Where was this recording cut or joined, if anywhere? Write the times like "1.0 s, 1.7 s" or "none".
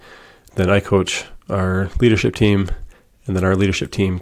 none